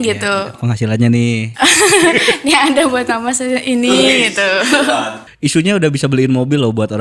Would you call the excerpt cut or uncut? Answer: cut